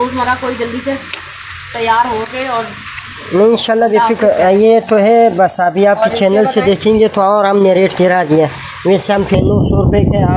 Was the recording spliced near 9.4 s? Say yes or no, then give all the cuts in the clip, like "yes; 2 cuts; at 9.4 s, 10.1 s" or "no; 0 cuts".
yes; 1 cut; at 9.4 s